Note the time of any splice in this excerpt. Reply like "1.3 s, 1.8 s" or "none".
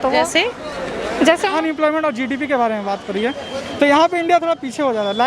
1.5 s